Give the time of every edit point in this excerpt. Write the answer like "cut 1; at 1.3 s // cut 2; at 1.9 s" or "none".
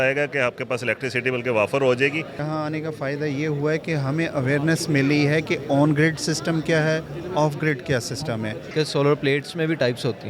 cut 1; at 2.3 s // cut 2; at 8.7 s